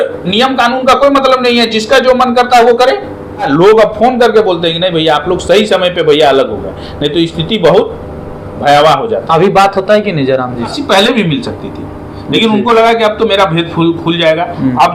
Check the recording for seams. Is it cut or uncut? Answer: cut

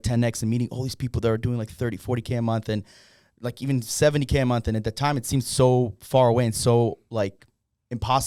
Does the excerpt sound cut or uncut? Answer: uncut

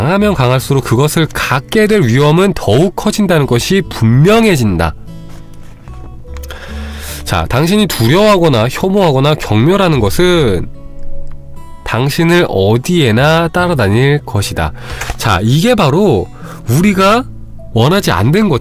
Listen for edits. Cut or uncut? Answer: uncut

